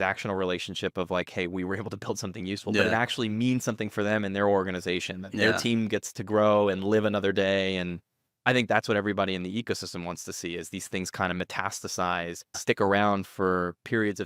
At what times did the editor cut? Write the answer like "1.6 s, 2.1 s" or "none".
12.6 s